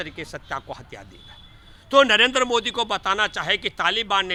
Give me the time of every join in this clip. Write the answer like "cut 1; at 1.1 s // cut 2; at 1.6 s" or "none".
none